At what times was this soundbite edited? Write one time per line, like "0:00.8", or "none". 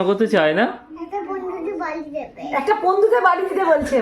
none